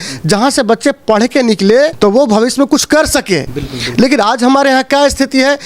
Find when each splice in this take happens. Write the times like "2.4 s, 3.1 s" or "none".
none